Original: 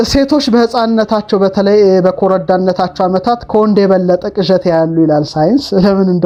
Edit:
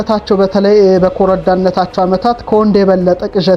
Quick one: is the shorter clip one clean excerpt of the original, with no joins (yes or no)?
yes